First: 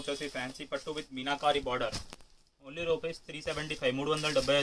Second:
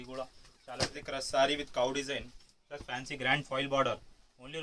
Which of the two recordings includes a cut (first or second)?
second